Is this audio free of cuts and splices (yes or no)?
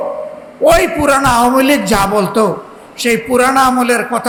yes